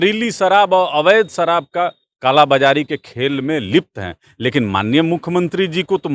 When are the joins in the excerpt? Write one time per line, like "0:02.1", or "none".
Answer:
none